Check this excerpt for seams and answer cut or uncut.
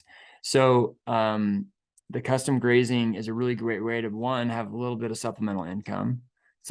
uncut